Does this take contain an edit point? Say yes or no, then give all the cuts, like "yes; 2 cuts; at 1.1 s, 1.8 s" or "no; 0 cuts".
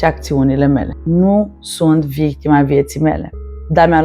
yes; 1 cut; at 0.9 s